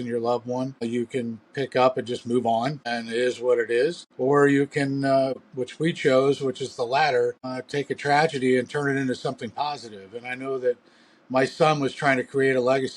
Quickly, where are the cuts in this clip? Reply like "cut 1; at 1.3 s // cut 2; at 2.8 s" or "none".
cut 1; at 0.8 s // cut 2; at 2.9 s // cut 3; at 4.1 s // cut 4; at 5.4 s // cut 5; at 7.5 s